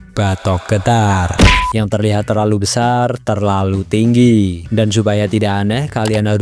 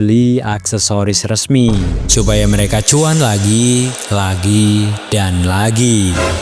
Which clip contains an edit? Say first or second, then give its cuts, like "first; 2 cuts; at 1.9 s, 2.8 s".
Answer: first; 1 cut; at 1.5 s